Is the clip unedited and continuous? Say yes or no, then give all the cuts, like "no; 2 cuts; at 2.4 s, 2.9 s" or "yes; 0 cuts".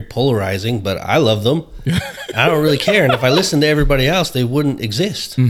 yes; 0 cuts